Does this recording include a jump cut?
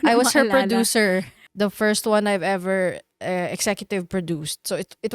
yes; 1 cut; at 1.4 s

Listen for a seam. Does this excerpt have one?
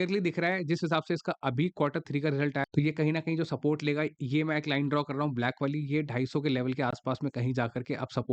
yes; 1 cut; at 2.6 s

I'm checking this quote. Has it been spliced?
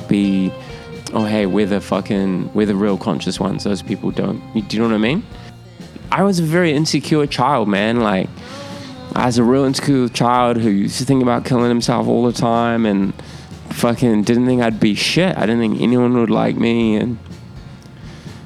yes; 1 cut; at 5.8 s

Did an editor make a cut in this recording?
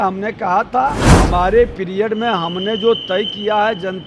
yes; 1 cut; at 1.1 s

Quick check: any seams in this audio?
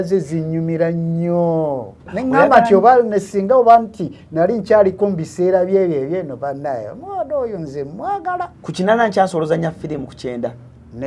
yes; 2 cuts; at 2.1 s, 8.6 s

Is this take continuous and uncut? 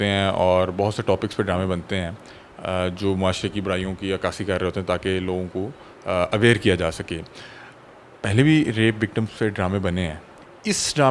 yes; 0 cuts

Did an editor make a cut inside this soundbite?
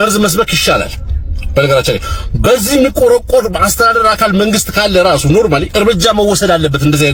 no; 0 cuts

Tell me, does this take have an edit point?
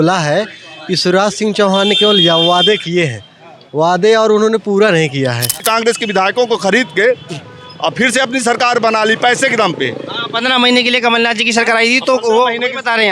yes; 1 cut; at 5.6 s

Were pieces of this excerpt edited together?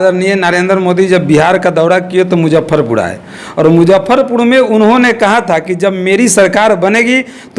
no; 0 cuts

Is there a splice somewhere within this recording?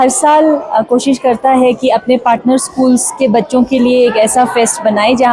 no; 0 cuts

